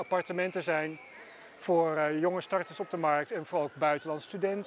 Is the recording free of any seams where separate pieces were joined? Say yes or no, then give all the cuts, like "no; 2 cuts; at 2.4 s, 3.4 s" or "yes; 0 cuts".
yes; 0 cuts